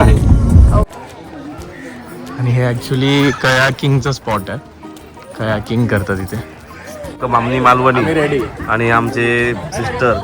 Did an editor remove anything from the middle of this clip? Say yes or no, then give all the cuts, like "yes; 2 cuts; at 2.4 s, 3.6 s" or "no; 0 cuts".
yes; 2 cuts; at 0.8 s, 7.2 s